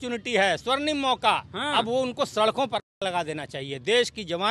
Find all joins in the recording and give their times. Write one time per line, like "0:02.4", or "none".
none